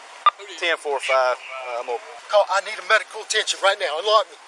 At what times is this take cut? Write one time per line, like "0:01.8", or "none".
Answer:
0:02.1